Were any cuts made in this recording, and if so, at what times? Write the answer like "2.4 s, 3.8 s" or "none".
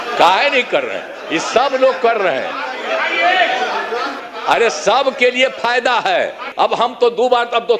4.1 s, 6.5 s